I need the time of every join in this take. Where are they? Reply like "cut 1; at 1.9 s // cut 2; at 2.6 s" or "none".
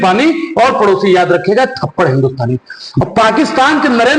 cut 1; at 2.8 s